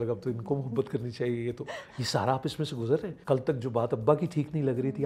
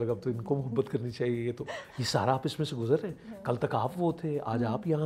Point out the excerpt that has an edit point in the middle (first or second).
first